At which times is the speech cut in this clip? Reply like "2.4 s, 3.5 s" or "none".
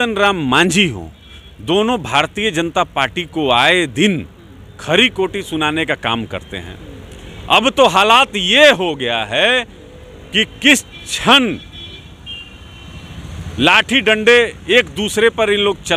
none